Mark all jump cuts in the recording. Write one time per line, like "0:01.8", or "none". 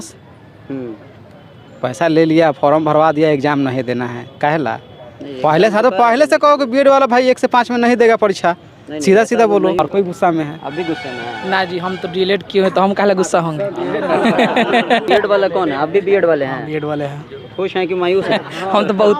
0:09.8
0:15.2
0:18.3